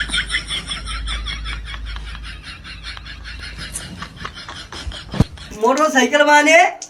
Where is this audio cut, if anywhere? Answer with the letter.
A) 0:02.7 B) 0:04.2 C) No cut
C